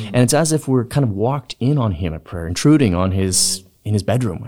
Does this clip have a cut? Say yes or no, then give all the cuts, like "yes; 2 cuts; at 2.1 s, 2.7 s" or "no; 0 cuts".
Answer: no; 0 cuts